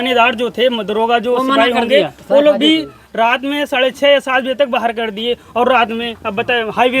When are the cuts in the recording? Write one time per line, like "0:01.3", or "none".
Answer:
none